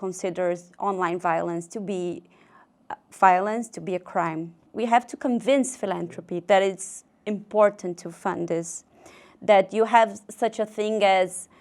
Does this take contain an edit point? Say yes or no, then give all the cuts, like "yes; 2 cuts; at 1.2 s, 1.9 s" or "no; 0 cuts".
yes; 1 cut; at 4.7 s